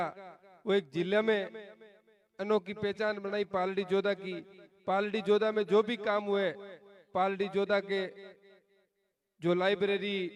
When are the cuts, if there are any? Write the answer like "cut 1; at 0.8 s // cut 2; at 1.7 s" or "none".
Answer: none

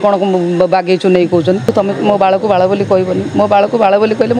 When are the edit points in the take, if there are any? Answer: cut 1; at 1.7 s

